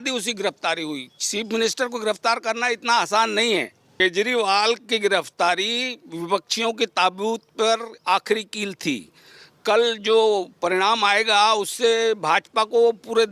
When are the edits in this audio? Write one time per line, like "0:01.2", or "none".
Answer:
0:03.8